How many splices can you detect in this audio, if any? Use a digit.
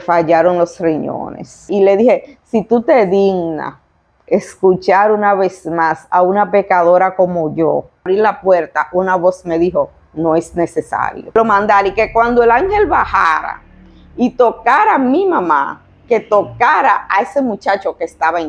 3